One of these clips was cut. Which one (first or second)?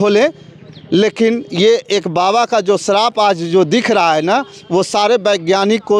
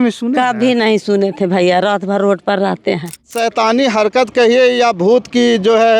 second